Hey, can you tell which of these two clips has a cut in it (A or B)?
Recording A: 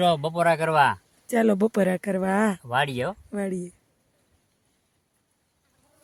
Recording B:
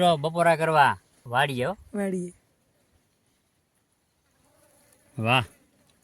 B